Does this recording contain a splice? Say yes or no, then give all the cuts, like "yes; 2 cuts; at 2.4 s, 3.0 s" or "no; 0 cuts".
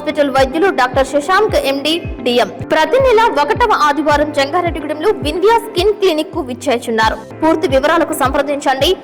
yes; 2 cuts; at 2.6 s, 7.3 s